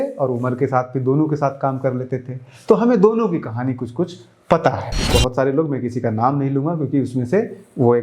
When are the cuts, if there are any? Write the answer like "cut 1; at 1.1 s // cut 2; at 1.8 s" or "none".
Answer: cut 1; at 5.0 s